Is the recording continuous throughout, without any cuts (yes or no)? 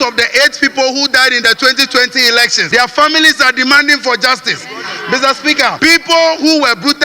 no